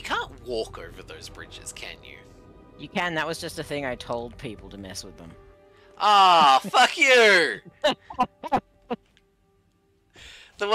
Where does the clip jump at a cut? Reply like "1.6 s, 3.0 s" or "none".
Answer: none